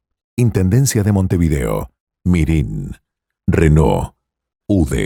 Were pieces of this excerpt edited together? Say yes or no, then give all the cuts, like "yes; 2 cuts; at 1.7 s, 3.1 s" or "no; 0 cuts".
no; 0 cuts